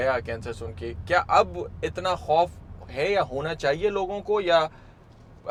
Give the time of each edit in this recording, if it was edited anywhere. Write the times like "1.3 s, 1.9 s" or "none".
none